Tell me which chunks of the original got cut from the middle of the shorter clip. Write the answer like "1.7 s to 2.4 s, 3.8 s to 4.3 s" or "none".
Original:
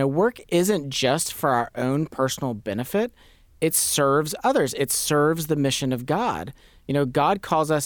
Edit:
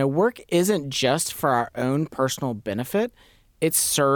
none